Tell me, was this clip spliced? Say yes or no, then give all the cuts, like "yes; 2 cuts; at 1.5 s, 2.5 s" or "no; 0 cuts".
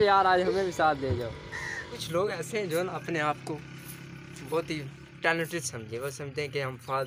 yes; 1 cut; at 2.0 s